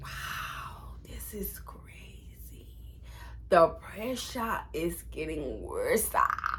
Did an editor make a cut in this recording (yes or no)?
no